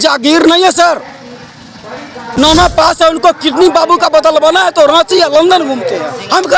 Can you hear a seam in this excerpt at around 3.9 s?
no; 1 cut; at 2.4 s

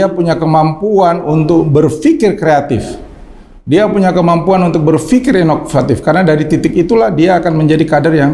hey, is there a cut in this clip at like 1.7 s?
yes; 1 cut; at 1.7 s

